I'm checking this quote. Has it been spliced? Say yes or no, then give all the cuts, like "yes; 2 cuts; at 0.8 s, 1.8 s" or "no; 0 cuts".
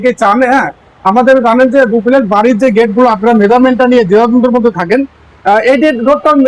no; 0 cuts